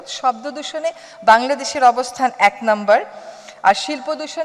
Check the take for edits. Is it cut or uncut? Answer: uncut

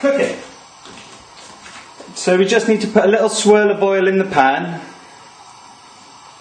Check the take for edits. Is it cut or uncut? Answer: cut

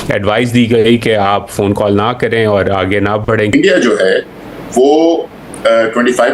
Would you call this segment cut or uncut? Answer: cut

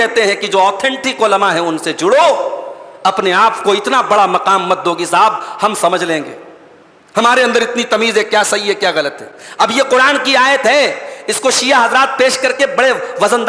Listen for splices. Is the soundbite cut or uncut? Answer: uncut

